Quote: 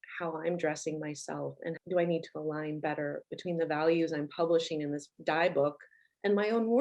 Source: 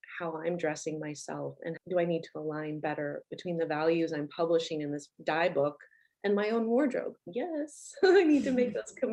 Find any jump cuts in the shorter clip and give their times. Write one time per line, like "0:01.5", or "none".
none

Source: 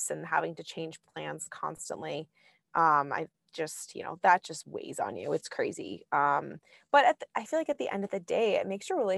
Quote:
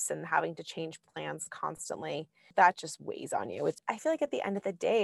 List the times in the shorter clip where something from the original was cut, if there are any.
0:02.4
0:03.8

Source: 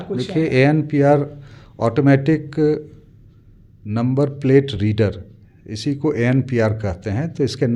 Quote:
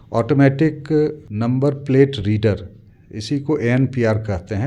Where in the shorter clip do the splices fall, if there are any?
0:01.3

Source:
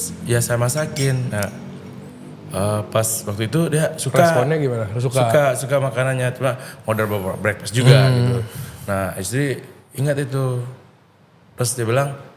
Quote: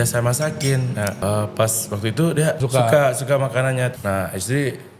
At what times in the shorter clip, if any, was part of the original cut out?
0:01.2
0:02.6
0:03.9

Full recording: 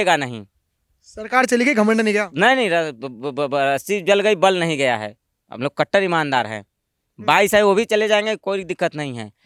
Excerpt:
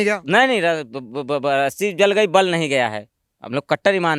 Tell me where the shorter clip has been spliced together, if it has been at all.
none

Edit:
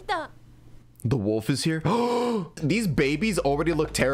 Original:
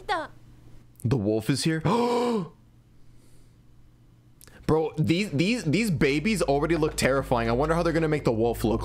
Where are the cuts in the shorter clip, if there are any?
0:02.6

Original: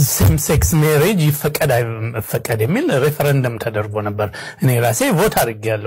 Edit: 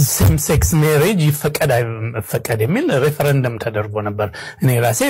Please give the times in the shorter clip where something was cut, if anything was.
none

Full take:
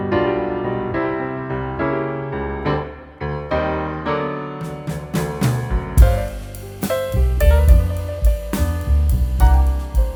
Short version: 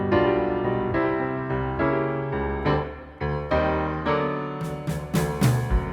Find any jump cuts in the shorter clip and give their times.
none

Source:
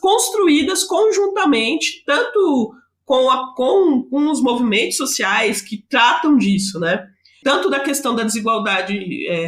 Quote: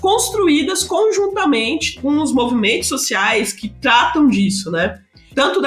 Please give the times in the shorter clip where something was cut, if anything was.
0:02.0

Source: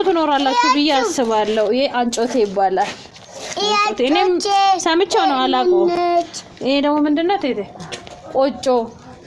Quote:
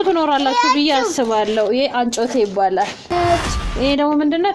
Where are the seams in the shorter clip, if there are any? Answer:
0:03.1

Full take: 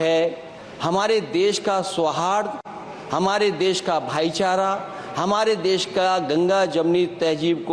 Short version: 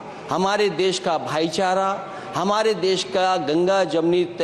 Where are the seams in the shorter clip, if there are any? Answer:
none

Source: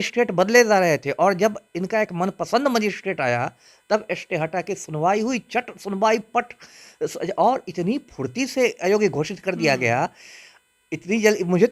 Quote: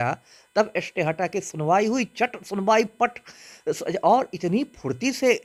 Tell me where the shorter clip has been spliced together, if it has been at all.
none

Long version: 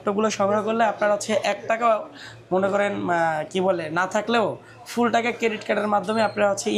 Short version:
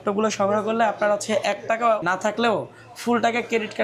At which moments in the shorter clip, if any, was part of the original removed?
0:02.0

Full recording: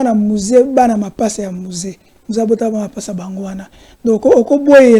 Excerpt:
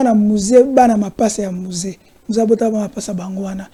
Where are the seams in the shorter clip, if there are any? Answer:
none

